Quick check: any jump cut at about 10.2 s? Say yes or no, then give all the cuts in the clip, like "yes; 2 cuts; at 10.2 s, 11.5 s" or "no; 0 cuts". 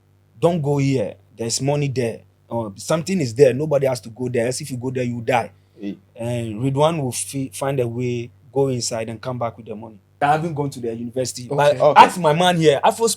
yes; 1 cut; at 10.2 s